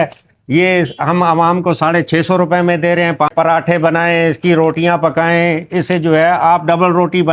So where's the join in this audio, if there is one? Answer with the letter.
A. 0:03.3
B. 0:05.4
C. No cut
A